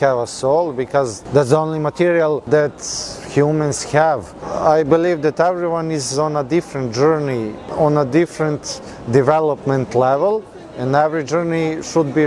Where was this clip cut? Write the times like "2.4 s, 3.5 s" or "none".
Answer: 1.2 s, 2.4 s, 4.5 s, 7.6 s